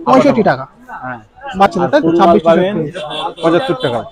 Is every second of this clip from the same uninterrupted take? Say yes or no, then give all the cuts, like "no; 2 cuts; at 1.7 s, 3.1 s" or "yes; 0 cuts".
yes; 0 cuts